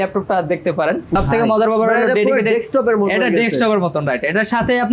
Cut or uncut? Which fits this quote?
cut